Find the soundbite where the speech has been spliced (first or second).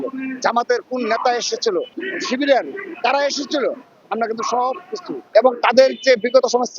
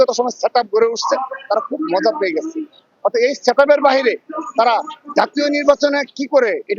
first